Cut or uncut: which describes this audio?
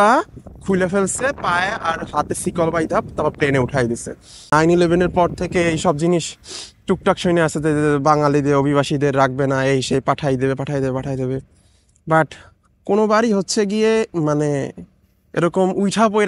cut